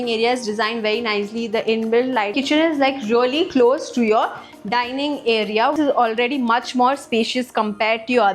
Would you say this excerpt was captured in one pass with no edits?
no; 2 cuts; at 2.3 s, 5.7 s

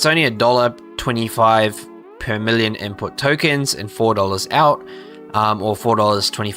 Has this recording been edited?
no; 0 cuts

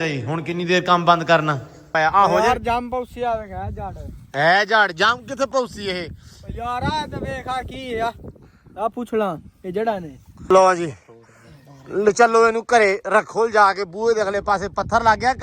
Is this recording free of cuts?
no; 2 cuts; at 1.8 s, 10.5 s

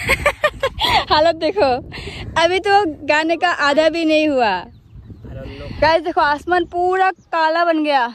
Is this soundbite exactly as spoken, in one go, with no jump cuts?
no; 1 cut; at 5.6 s

